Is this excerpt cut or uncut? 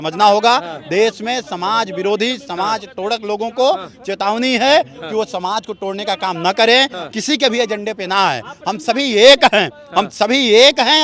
uncut